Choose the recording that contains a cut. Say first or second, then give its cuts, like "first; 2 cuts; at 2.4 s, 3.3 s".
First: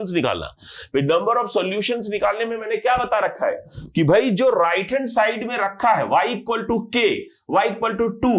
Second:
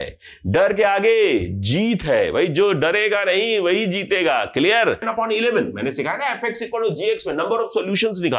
second; 1 cut; at 5.1 s